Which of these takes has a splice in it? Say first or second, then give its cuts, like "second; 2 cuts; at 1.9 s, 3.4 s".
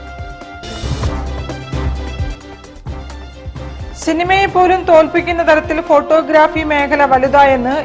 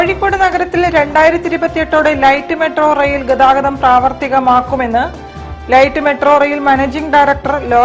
first; 1 cut; at 3.5 s